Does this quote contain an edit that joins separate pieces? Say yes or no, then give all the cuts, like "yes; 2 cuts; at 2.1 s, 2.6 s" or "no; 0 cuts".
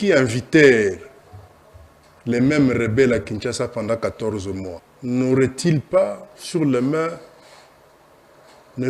yes; 1 cut; at 4.8 s